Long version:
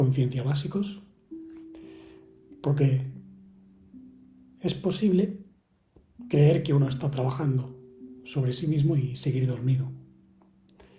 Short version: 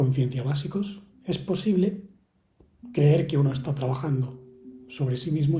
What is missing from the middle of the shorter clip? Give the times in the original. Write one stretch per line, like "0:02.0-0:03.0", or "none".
0:01.1-0:04.4